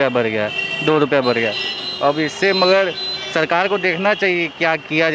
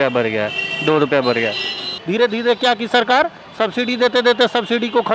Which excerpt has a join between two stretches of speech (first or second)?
second